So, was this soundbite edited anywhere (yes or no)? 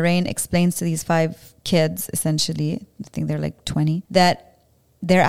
no